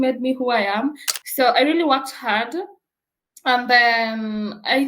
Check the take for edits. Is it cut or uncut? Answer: cut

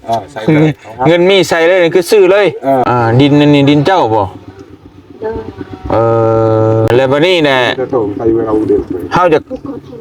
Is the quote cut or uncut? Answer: cut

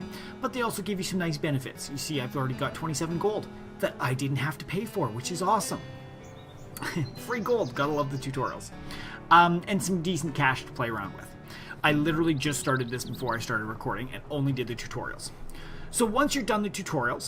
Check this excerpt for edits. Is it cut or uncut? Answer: uncut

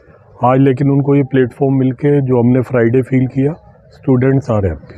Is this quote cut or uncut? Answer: uncut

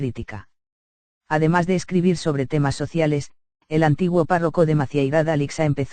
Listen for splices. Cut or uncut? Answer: uncut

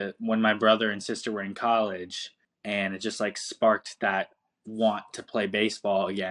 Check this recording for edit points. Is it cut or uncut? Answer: uncut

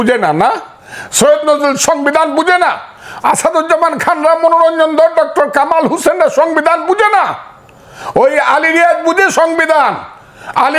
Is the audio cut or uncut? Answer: uncut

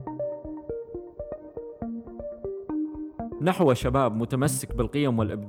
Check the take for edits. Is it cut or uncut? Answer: cut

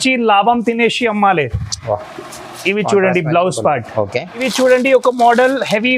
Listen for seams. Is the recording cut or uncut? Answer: cut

